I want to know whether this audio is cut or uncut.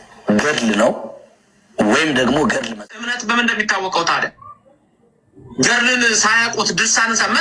cut